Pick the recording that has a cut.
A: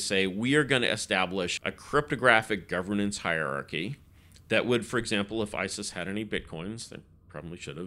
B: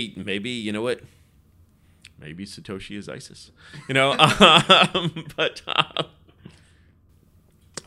A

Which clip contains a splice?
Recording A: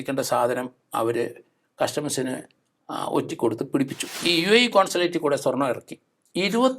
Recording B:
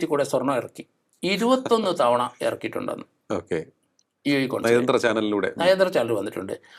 A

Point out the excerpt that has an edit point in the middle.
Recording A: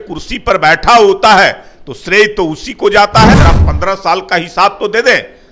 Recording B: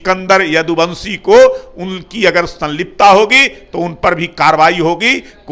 A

